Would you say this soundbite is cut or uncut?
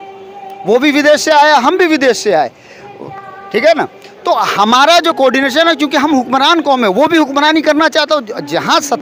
uncut